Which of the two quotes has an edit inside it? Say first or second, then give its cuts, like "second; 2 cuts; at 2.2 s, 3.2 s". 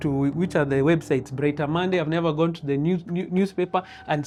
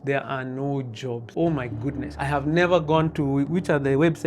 second; 2 cuts; at 1.2 s, 2.1 s